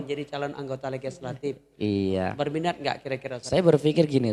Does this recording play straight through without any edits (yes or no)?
no